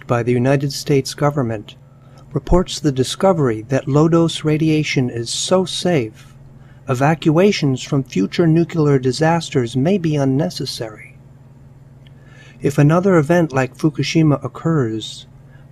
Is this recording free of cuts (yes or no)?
yes